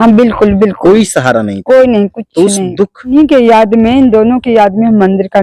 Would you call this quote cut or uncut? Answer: cut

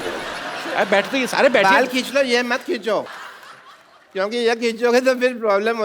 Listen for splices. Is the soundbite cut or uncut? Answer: cut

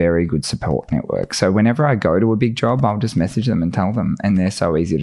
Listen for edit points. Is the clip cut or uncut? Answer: uncut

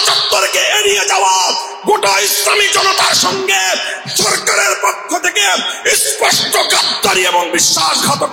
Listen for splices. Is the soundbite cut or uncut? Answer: uncut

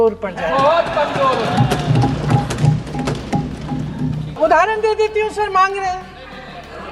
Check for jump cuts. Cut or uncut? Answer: cut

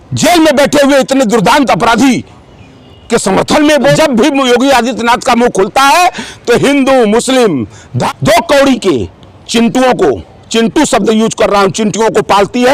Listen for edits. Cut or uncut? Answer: cut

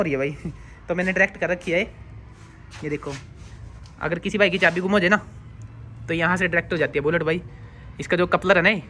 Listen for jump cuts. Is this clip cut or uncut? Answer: uncut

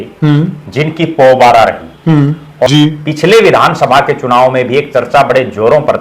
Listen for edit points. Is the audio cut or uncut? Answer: cut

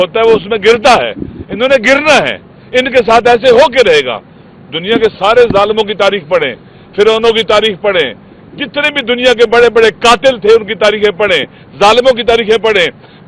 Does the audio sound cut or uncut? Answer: uncut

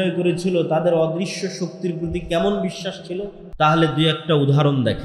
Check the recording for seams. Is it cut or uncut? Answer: cut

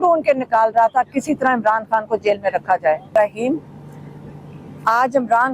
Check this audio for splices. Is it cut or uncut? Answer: cut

